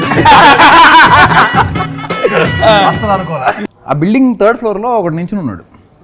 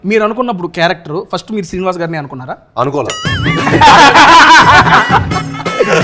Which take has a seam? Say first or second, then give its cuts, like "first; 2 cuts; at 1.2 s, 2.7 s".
first; 1 cut; at 3.6 s